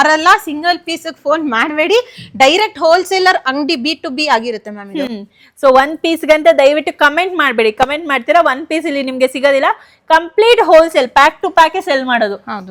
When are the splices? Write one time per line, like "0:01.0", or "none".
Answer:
none